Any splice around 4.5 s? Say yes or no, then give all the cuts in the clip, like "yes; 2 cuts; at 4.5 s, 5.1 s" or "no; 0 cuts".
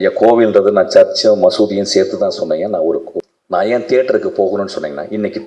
no; 1 cut; at 3.1 s